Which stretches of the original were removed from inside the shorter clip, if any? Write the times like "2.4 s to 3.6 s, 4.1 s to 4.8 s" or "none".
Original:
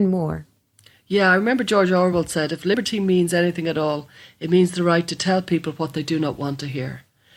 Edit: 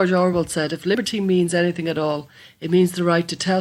none